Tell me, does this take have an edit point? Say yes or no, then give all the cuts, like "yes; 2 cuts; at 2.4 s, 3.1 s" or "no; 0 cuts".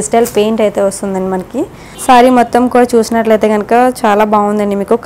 yes; 1 cut; at 1.9 s